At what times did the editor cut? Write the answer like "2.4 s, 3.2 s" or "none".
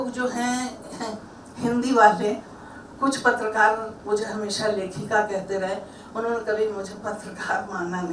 none